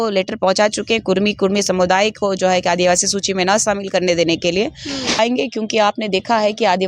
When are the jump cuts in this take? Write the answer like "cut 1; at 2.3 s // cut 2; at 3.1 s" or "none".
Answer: cut 1; at 5.2 s